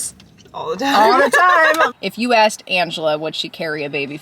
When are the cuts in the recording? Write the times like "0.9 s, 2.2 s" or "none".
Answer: 1.9 s